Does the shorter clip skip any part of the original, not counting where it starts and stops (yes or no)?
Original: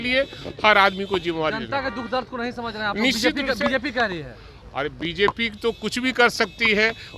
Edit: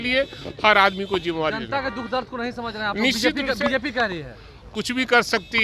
yes